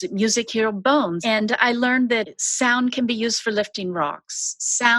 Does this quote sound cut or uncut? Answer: cut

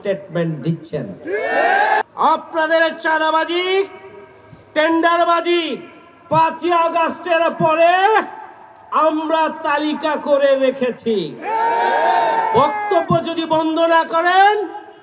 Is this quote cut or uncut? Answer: cut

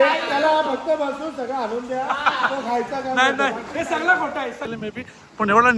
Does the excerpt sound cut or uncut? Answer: cut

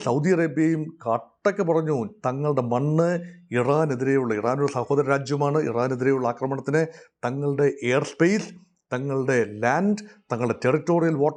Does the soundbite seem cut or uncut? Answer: uncut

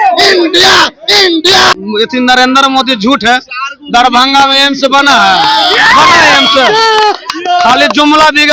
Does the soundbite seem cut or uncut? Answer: cut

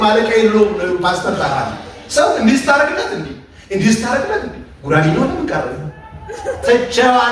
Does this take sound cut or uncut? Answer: uncut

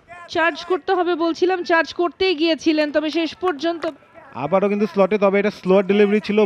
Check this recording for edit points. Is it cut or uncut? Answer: cut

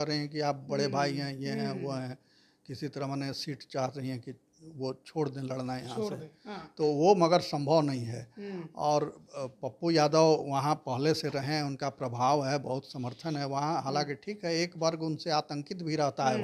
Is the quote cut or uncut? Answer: uncut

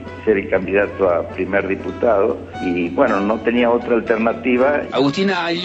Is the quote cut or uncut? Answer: cut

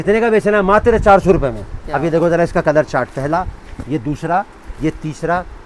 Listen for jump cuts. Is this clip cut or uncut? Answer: uncut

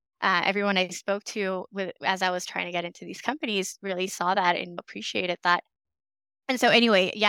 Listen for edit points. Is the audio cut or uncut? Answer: uncut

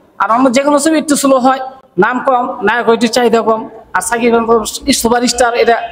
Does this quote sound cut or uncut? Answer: uncut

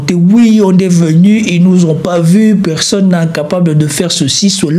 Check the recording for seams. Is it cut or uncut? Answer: uncut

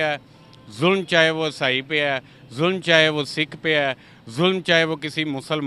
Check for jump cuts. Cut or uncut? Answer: uncut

